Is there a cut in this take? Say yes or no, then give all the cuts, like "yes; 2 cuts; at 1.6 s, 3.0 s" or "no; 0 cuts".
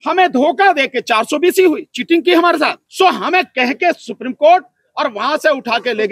yes; 1 cut; at 2.8 s